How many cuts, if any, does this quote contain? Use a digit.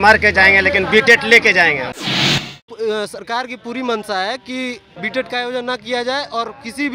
2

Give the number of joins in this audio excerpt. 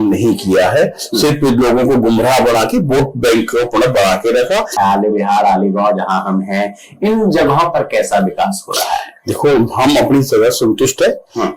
1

